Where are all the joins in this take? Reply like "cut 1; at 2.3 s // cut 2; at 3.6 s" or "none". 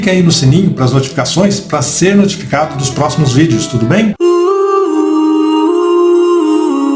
none